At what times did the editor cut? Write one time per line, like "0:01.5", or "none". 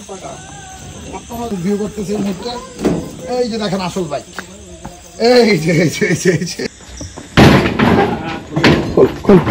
0:01.5
0:06.6